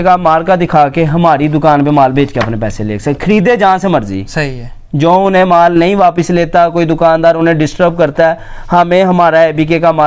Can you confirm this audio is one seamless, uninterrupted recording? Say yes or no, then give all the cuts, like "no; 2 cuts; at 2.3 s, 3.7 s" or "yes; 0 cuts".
yes; 0 cuts